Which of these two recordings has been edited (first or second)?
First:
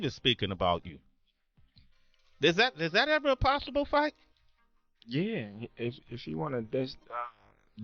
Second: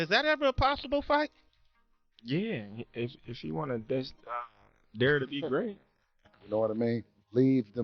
second